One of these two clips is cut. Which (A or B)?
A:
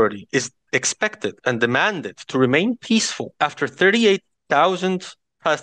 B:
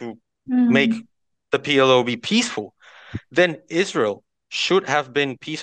A